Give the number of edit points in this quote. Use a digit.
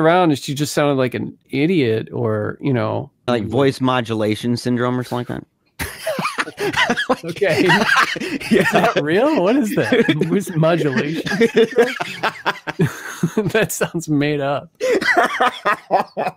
2